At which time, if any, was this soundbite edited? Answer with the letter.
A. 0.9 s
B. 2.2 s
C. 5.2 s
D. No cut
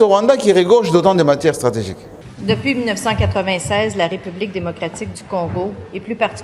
B